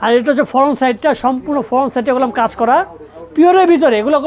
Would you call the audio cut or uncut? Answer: uncut